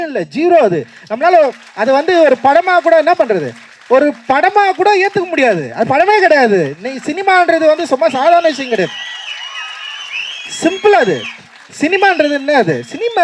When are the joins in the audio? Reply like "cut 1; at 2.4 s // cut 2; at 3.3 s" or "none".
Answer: none